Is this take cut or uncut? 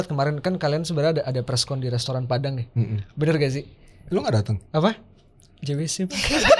uncut